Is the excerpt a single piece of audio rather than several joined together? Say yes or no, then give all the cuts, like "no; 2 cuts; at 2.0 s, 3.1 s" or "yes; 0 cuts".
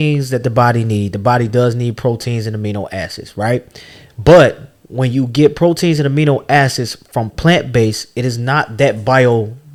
yes; 0 cuts